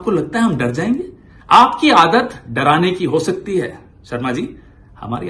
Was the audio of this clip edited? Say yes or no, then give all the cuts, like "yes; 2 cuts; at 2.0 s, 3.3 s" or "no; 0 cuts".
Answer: no; 0 cuts